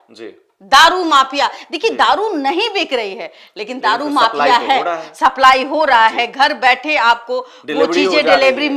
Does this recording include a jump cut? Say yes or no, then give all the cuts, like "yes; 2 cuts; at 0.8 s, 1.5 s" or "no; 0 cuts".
no; 0 cuts